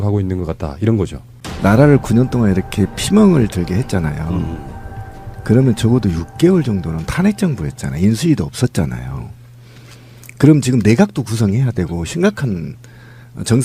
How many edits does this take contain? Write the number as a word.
one